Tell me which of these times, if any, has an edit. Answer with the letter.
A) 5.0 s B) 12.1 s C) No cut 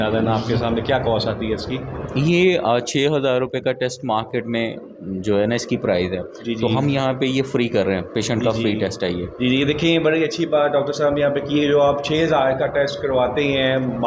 C